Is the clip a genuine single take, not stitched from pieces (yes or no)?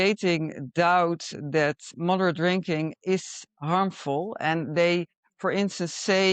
no